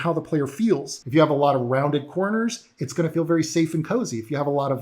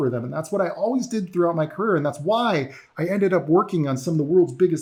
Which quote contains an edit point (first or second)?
first